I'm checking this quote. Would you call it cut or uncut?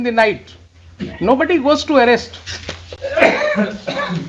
uncut